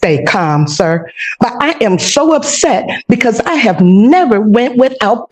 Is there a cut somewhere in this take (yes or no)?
no